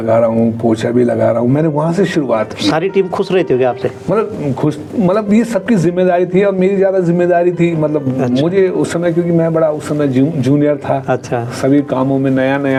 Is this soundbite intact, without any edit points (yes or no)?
yes